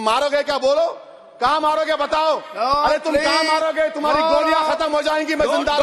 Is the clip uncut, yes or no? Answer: yes